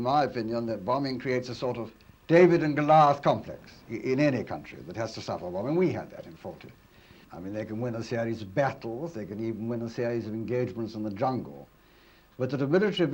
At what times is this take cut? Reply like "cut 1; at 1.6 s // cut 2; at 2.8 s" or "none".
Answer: cut 1; at 7.2 s